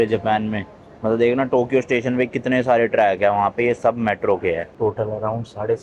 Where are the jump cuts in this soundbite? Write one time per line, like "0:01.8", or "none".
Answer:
0:04.7